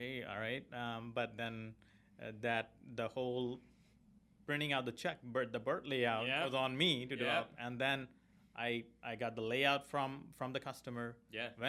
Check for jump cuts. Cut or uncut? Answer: uncut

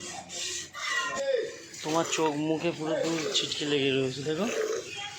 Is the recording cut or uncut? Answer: cut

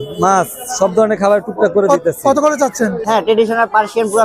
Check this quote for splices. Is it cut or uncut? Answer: cut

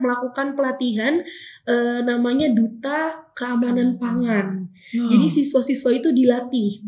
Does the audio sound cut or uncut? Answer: uncut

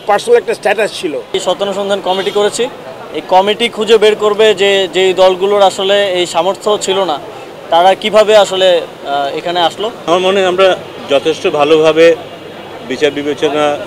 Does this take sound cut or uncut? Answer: cut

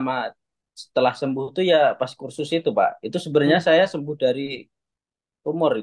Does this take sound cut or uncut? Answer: uncut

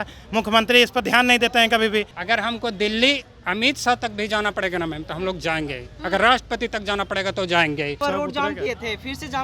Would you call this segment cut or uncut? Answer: cut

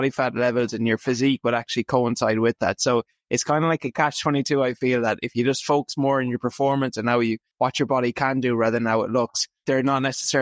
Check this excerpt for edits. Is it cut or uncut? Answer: cut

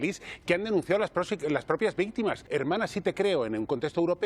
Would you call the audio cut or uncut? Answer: cut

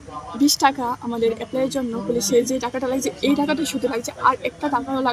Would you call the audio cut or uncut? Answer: uncut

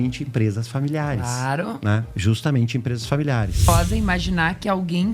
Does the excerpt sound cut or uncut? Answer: cut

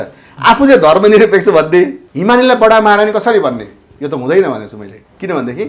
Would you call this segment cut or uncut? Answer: cut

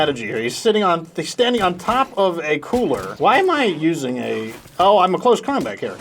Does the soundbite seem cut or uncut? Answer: cut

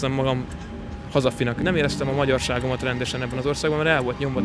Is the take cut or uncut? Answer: cut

